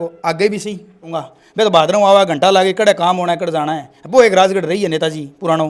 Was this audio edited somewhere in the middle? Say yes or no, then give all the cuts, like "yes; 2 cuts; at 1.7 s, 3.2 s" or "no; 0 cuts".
yes; 1 cut; at 1.2 s